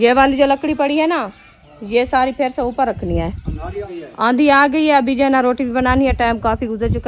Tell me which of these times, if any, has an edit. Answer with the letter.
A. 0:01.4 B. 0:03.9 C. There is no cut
B